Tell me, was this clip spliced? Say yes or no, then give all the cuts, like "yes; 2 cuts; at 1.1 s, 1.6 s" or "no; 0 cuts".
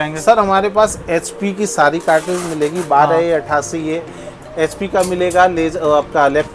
no; 0 cuts